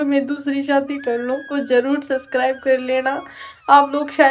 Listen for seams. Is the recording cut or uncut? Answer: cut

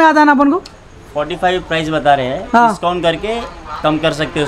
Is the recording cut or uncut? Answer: uncut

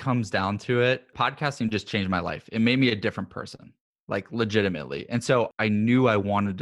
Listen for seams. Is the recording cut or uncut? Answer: cut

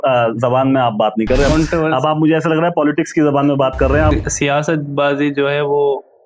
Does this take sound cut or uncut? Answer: cut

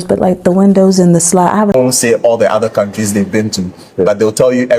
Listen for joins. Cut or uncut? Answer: cut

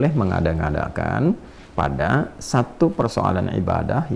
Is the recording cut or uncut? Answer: uncut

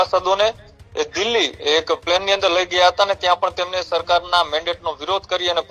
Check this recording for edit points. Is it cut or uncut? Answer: uncut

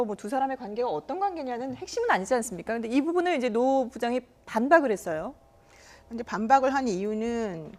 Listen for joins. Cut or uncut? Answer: cut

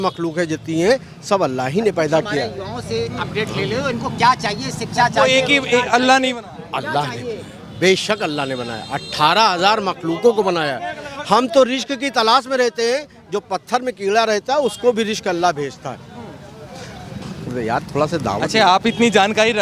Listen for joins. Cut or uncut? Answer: uncut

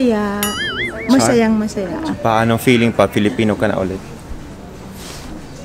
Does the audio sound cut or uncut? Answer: cut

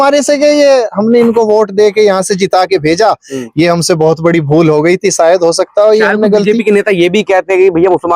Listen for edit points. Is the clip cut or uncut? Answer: uncut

